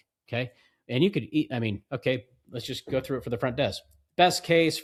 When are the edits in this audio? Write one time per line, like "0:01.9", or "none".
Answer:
none